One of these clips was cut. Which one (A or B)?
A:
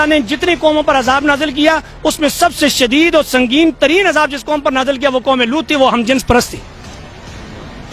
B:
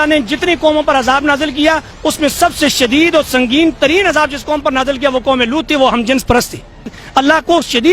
B